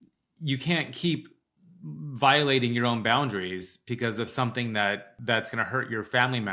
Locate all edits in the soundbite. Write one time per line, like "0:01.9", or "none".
0:05.1